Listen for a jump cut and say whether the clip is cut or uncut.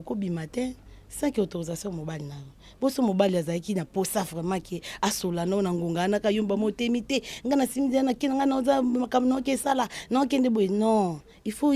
uncut